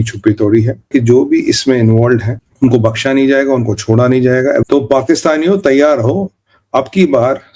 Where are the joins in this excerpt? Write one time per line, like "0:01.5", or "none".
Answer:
0:00.9
0:02.4
0:04.6